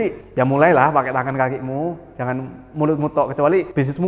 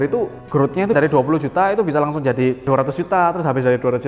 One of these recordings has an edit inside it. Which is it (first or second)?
second